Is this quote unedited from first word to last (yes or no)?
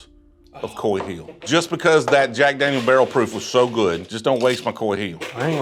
no